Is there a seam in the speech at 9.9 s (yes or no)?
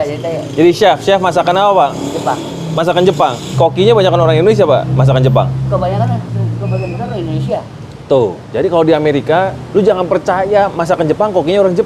no